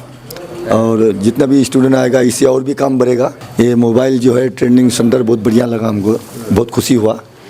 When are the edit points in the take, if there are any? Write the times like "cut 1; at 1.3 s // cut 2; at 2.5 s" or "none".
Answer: cut 1; at 3.4 s